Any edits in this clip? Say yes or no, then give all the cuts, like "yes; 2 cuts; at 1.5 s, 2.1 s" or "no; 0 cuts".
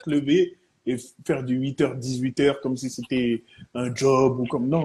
no; 0 cuts